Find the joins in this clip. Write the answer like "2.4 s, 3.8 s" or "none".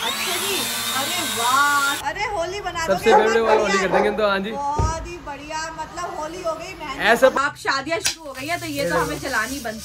2.0 s, 7.3 s